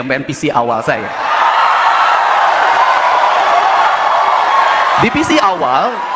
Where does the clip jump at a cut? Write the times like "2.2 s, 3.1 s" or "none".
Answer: none

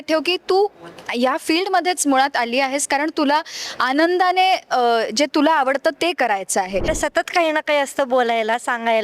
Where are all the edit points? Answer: 6.9 s

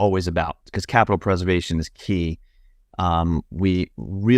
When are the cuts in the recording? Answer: none

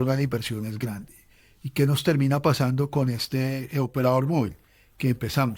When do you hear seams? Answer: none

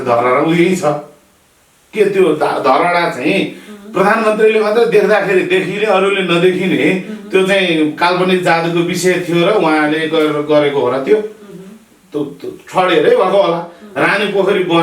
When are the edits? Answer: none

